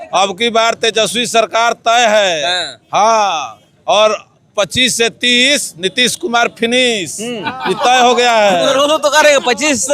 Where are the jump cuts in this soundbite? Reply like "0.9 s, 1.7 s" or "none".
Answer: none